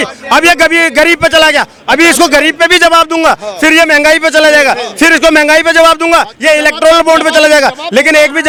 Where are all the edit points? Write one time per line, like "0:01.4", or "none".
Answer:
none